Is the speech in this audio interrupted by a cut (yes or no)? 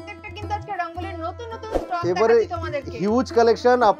no